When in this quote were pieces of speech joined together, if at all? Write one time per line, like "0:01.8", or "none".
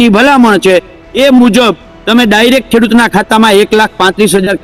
none